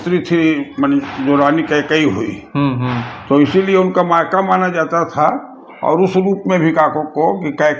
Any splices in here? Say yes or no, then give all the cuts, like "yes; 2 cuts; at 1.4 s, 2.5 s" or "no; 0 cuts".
no; 0 cuts